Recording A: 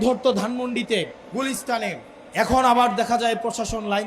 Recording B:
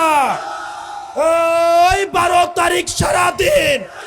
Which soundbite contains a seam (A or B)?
A